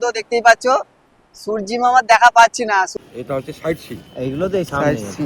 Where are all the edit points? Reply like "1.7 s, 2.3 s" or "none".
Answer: 2.9 s